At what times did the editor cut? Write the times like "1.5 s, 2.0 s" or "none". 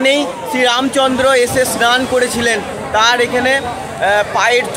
none